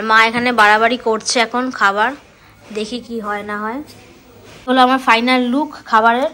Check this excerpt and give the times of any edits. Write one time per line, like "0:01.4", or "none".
0:04.6